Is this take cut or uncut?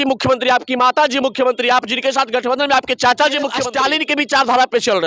cut